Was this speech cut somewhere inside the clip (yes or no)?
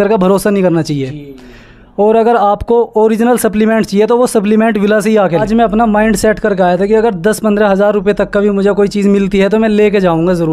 yes